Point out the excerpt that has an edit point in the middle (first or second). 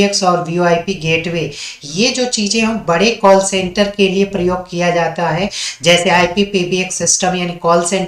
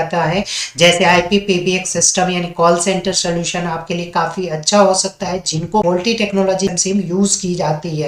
second